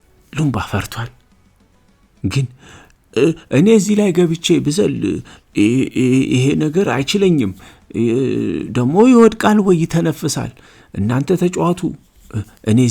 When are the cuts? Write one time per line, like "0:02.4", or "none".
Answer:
0:02.2

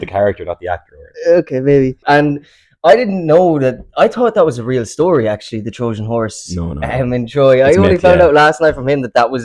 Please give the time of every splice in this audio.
0:02.0

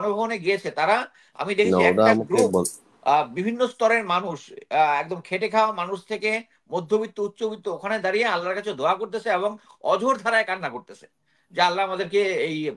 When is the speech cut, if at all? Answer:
none

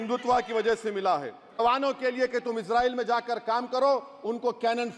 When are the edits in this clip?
0:01.6

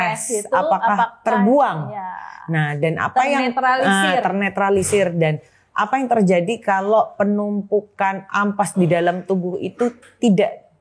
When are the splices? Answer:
none

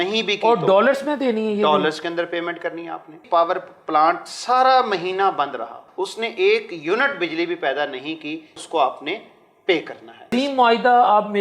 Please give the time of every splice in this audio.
0:03.2
0:05.8
0:08.6
0:10.3

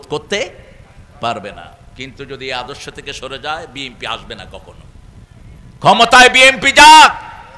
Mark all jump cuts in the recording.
0:05.8

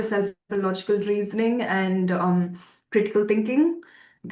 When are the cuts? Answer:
none

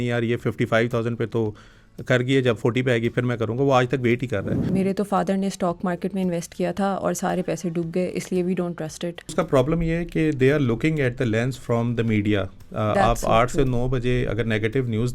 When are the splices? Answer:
0:04.6
0:09.3

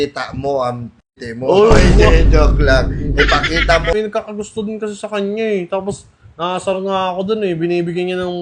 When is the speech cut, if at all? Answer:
0:03.9

